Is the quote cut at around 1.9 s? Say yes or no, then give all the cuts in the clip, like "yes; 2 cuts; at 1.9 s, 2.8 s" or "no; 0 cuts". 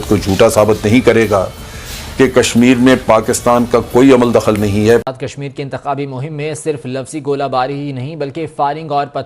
no; 1 cut; at 5.0 s